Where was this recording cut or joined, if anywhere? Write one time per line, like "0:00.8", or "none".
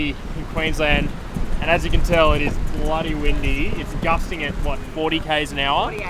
none